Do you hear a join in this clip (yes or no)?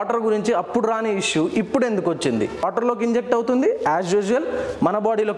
yes